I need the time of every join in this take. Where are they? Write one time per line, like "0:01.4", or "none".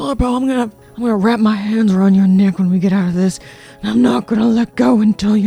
none